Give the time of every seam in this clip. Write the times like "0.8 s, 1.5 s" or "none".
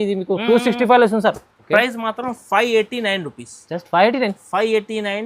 1.5 s